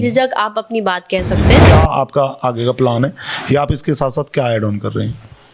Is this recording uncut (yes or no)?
no